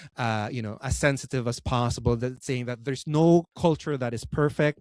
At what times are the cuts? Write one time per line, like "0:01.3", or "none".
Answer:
0:03.5